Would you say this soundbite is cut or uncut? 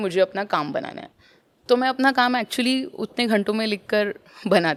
uncut